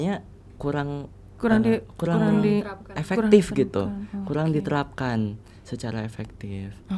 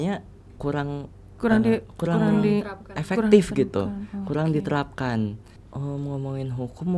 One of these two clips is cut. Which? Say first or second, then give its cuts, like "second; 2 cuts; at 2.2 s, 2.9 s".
second; 1 cut; at 5.5 s